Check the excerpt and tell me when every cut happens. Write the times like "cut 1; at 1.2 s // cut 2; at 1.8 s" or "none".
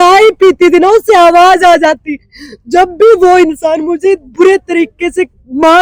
none